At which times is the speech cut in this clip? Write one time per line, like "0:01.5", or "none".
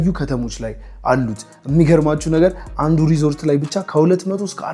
none